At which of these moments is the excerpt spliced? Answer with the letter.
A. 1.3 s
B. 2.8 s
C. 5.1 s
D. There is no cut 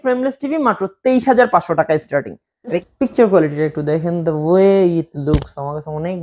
B